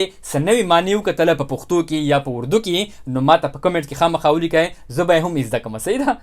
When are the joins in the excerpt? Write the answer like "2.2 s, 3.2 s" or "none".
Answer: none